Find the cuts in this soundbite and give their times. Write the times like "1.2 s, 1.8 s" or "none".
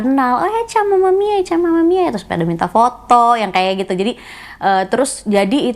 none